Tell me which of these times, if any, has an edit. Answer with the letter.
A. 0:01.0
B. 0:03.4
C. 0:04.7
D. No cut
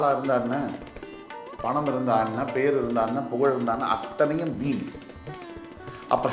D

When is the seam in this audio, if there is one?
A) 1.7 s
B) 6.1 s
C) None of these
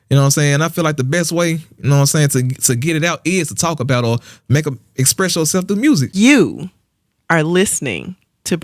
B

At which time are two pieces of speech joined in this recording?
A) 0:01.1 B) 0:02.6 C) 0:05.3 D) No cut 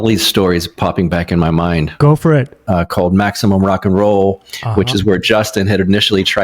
B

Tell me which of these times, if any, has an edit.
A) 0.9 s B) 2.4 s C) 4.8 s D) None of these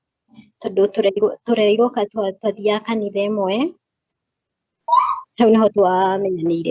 C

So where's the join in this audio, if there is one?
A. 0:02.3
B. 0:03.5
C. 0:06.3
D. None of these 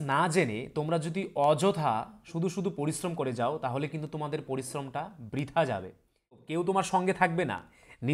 C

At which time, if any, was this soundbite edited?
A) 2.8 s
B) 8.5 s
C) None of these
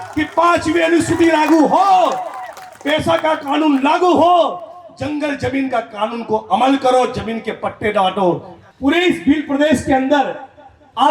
B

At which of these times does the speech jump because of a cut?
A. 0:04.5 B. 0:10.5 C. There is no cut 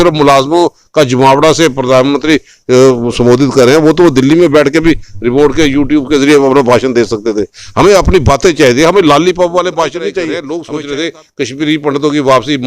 B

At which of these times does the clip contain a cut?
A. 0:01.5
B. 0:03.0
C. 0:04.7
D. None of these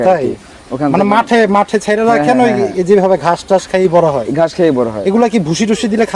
D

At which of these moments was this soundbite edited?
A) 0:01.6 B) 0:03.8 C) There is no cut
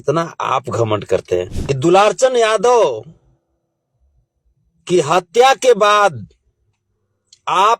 A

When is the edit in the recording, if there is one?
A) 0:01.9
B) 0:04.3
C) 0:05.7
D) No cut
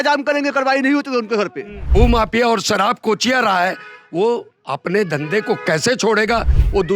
A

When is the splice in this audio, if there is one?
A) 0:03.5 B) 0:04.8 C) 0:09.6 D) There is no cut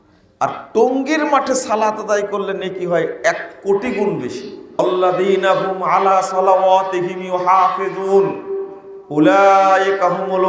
B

